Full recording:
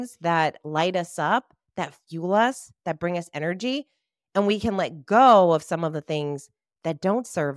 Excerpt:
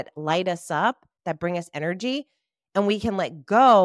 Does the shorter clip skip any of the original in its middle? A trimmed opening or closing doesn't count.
yes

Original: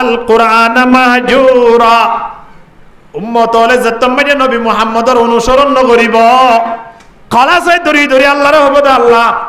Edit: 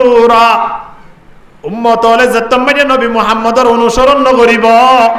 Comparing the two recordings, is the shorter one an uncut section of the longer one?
yes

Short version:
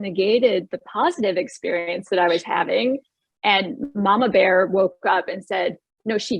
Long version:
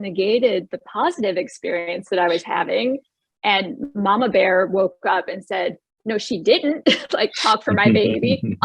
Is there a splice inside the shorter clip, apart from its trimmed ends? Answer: no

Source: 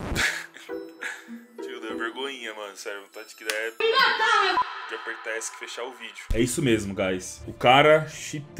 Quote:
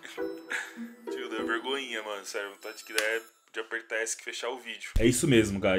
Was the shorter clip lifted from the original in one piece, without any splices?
no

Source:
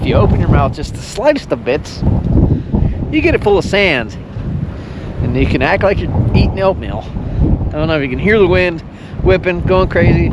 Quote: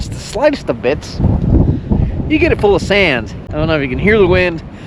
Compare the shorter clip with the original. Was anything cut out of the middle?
yes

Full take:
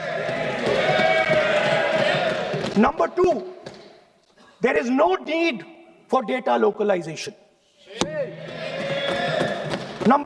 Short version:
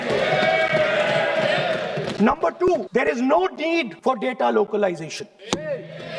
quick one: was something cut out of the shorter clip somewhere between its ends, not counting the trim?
yes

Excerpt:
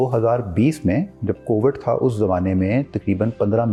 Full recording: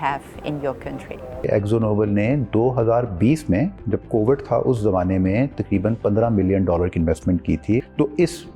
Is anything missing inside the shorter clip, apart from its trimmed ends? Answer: no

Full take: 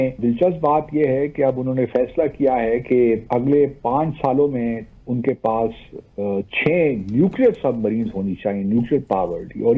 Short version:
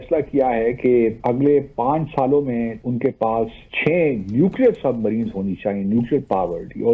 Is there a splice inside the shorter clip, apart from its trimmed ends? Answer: yes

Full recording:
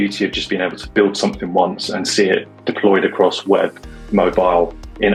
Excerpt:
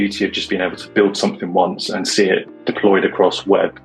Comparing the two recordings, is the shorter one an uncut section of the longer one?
yes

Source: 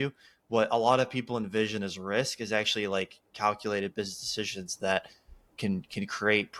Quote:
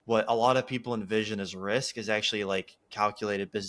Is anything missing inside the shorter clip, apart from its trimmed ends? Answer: no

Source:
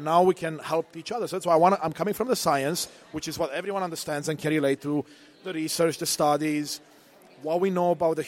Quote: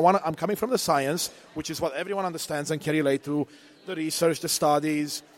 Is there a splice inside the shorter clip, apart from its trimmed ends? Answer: no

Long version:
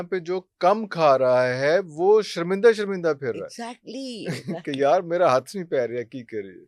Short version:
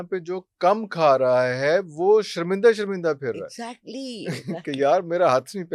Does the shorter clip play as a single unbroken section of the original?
yes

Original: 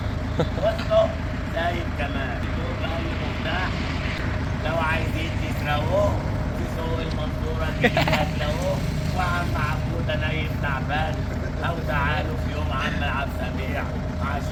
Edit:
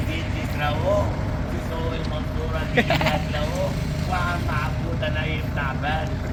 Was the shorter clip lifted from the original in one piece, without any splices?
yes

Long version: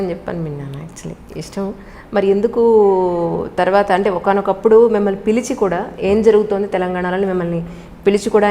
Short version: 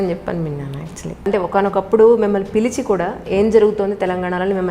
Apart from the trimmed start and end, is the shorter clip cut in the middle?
yes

